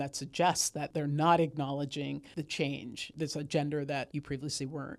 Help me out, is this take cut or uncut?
cut